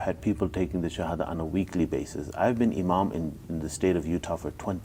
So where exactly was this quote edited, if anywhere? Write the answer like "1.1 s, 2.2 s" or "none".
none